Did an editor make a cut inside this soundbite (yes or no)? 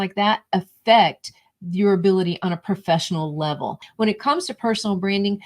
yes